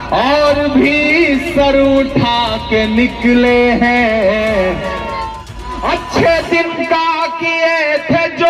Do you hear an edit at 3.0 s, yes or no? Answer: no